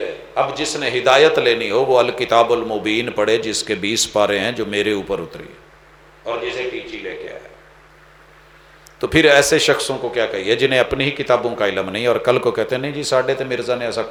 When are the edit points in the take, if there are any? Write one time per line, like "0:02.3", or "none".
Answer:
none

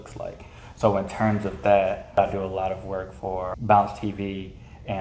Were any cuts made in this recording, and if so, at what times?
0:02.2
0:03.6

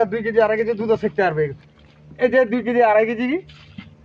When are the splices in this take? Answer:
0:01.6

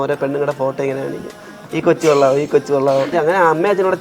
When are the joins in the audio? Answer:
0:03.1

